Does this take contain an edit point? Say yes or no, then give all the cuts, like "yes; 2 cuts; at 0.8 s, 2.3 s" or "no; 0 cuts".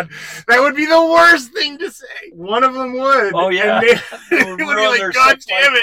yes; 1 cut; at 2.3 s